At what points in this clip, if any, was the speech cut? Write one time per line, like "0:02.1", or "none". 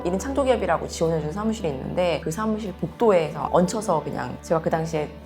0:02.2
0:04.4